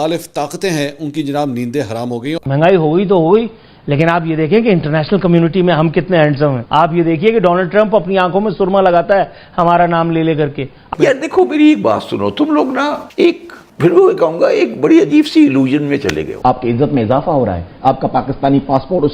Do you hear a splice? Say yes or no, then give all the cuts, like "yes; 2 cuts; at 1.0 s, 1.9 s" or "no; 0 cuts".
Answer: yes; 3 cuts; at 2.3 s, 10.9 s, 16.3 s